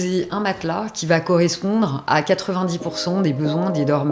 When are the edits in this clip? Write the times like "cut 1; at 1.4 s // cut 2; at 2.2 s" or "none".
none